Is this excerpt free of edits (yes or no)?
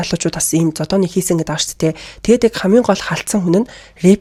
yes